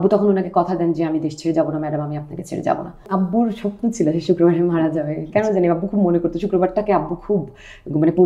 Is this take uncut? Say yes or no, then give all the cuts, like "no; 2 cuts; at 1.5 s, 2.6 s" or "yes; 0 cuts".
no; 1 cut; at 3.1 s